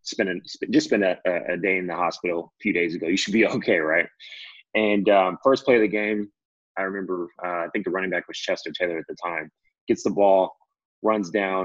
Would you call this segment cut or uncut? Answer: uncut